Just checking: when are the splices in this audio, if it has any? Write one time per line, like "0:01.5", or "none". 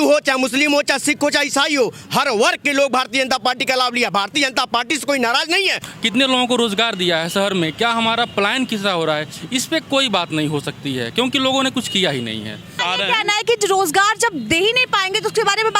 0:05.8
0:12.8